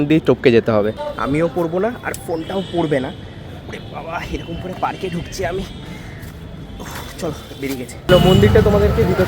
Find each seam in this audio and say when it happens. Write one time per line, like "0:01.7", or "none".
0:01.0
0:08.1